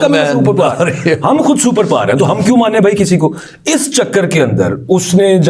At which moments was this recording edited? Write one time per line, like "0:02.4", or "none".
none